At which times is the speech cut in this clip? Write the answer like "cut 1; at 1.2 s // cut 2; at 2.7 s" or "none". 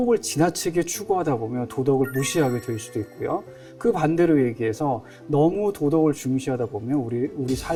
none